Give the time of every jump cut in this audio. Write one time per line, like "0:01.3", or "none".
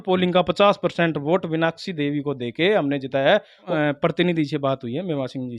0:03.6